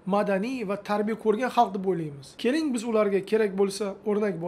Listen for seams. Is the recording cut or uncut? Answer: uncut